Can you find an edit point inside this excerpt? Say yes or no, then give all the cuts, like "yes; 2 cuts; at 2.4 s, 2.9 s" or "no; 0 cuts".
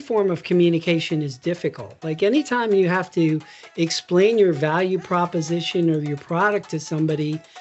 no; 0 cuts